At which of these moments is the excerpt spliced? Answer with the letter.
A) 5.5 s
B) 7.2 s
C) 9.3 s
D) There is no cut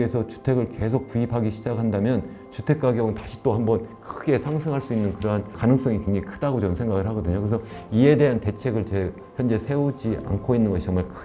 A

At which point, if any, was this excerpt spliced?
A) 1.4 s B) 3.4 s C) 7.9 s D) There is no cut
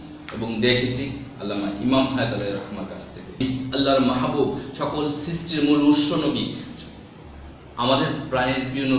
B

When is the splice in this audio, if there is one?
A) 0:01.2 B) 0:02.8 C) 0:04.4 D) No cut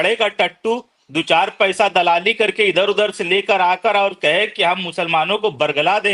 D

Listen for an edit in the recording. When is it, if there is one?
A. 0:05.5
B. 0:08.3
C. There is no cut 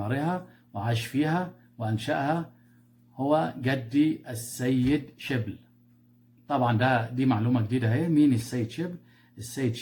C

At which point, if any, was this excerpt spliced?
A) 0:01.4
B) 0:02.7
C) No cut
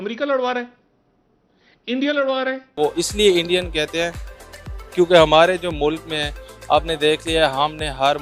B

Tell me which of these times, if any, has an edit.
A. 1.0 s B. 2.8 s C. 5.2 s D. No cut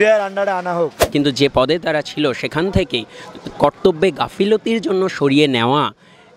A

